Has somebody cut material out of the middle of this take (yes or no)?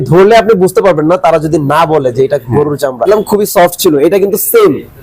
yes